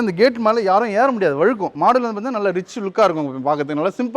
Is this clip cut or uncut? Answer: uncut